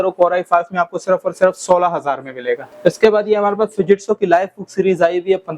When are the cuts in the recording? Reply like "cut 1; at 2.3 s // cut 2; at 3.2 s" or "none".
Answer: cut 1; at 2.7 s